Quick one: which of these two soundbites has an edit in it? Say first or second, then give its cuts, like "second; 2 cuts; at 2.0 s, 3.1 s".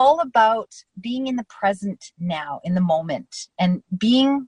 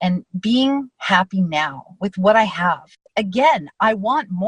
second; 1 cut; at 3.0 s